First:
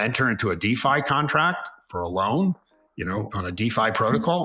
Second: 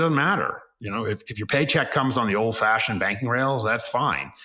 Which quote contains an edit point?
first; 2 cuts; at 1.9 s, 3.3 s

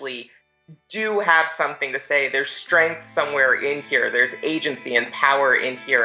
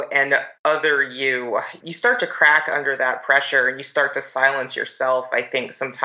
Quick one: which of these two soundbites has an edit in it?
second; 1 cut; at 1.8 s

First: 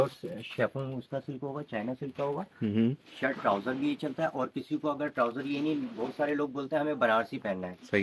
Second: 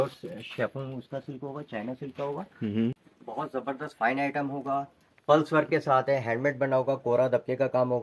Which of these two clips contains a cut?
second; 1 cut; at 3.1 s

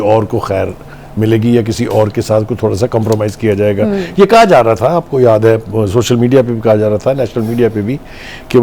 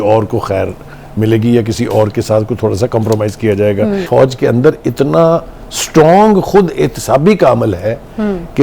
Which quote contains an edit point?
second; 1 cut; at 4.1 s

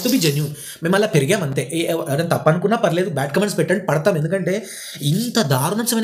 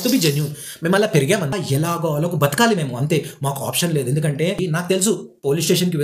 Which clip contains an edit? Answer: second; 2 cuts; at 1.5 s, 4.6 s

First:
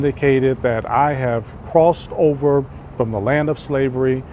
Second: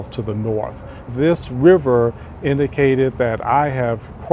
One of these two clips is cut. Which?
second; 1 cut; at 1.1 s

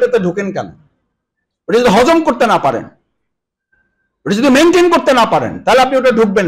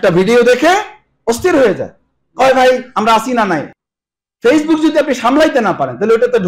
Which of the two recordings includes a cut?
second; 1 cut; at 3.7 s

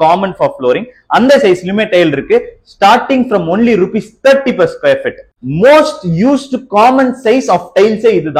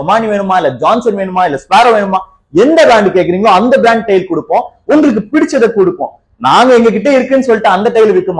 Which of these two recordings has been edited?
first; 1 cut; at 5.2 s

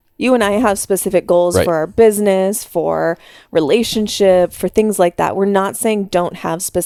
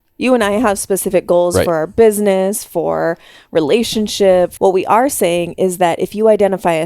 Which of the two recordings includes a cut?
second; 1 cut; at 4.5 s

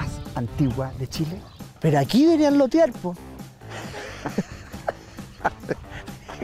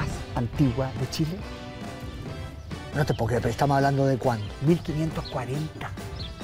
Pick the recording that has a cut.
first; 1 cut; at 1.5 s

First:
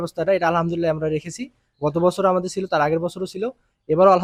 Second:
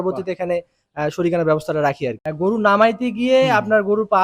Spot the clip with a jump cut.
second; 1 cut; at 2.2 s

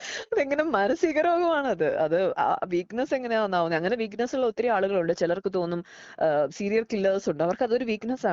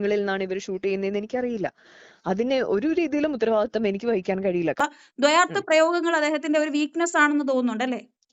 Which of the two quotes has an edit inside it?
second; 1 cut; at 4.8 s

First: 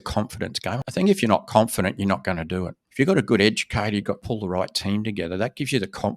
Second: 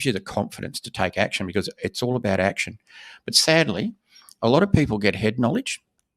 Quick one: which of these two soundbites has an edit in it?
first; 3 cuts; at 0.8 s, 2.8 s, 4.2 s

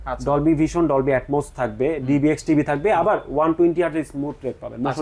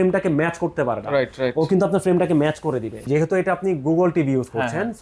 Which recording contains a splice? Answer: second; 1 cut; at 3.1 s

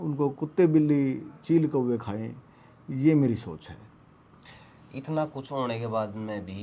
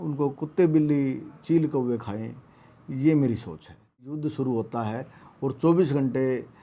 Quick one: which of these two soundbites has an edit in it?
second; 1 cut; at 4.1 s

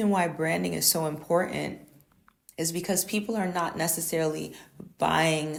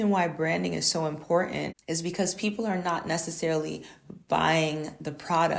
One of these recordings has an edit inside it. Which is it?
second; 1 cut; at 1.8 s

